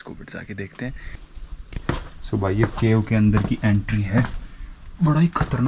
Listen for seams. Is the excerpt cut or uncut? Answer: uncut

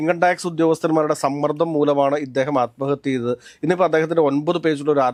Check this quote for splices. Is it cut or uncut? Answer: uncut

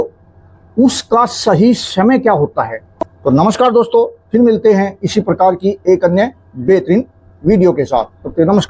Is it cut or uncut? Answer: cut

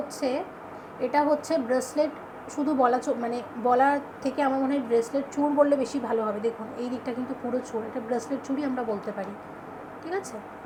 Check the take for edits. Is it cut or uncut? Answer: uncut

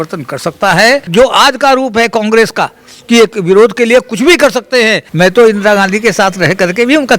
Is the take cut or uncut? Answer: cut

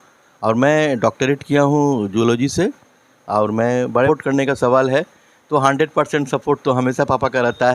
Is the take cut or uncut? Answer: cut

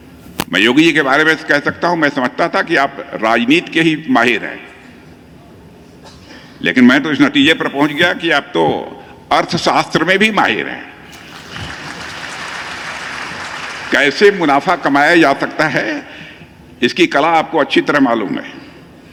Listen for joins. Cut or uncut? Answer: uncut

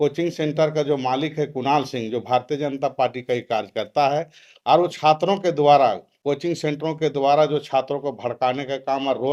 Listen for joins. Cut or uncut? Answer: uncut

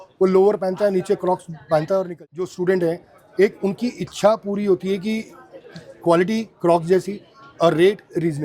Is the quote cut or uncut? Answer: cut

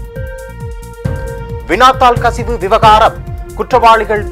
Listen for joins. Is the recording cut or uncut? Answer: cut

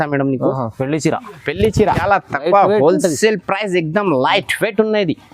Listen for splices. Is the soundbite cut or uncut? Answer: cut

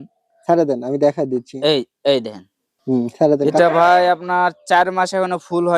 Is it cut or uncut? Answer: cut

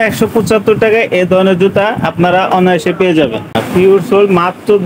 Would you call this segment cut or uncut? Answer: cut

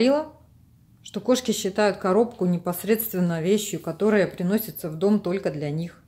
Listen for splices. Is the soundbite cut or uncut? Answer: uncut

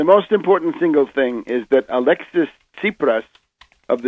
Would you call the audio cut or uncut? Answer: cut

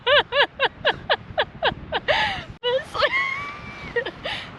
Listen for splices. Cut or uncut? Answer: cut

